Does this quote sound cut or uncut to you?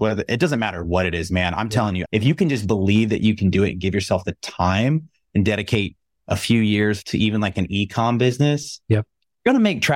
cut